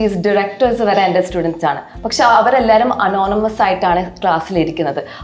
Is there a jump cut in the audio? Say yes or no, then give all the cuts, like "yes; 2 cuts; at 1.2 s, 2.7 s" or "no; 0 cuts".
no; 0 cuts